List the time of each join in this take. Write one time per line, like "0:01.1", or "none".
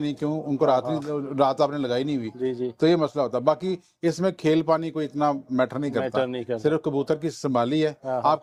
none